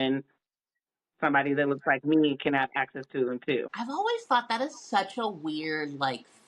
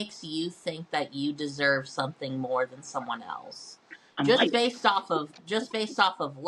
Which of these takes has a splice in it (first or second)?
first